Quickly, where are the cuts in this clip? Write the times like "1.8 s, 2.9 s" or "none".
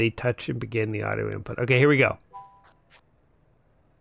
none